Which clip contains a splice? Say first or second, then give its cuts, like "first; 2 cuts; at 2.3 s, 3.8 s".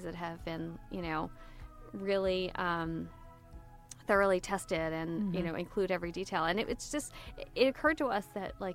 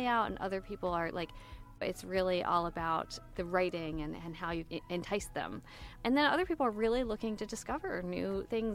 second; 4 cuts; at 1.8 s, 3.2 s, 4.6 s, 5.9 s